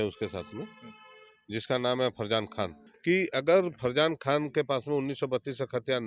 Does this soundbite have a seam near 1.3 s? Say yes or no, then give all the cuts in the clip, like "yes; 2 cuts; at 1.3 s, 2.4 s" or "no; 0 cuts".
no; 1 cut; at 2.9 s